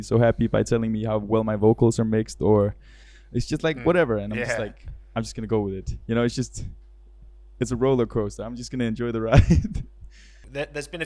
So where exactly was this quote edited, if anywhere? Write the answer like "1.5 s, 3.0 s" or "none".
none